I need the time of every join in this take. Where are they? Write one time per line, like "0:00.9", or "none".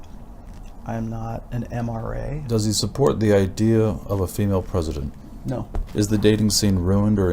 0:02.4
0:05.8

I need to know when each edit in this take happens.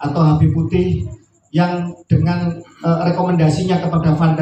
none

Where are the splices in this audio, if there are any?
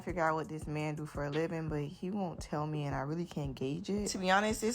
0:01.9

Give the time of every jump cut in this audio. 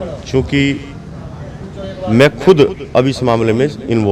none

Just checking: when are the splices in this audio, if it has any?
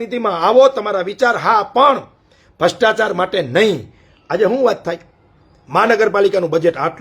none

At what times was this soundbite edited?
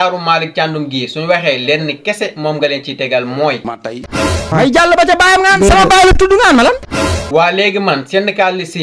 0:04.0
0:06.8

